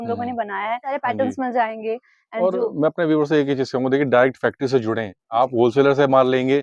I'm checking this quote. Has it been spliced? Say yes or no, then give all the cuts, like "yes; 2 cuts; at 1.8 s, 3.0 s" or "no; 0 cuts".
yes; 1 cut; at 1.0 s